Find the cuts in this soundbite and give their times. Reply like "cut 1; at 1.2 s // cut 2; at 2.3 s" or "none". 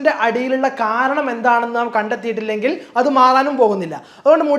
none